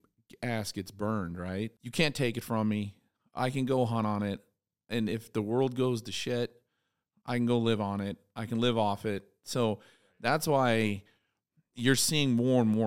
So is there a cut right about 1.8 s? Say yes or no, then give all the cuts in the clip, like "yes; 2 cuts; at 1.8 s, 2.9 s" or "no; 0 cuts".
yes; 1 cut; at 1.8 s